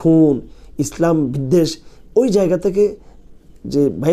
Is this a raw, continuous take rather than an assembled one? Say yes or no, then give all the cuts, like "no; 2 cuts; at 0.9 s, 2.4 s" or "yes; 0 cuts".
yes; 0 cuts